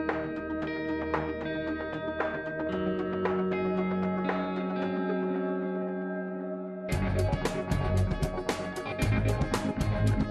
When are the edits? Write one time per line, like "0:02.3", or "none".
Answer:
0:02.7